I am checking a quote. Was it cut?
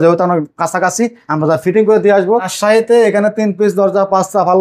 yes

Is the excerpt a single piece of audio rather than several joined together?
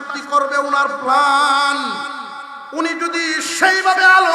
yes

